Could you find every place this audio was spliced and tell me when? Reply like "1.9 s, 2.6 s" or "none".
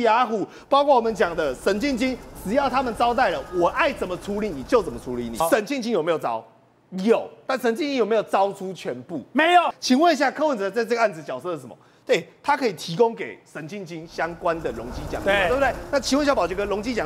5.4 s, 9.8 s